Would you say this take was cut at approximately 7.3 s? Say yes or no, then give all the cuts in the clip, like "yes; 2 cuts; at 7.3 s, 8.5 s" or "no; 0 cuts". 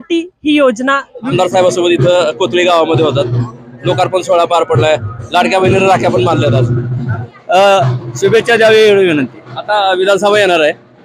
yes; 2 cuts; at 1.3 s, 7.3 s